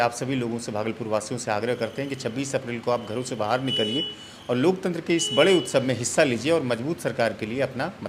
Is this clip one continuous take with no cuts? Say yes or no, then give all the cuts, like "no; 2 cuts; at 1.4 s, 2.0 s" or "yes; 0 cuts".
yes; 0 cuts